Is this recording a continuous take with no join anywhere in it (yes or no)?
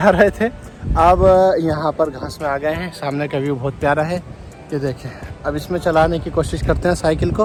yes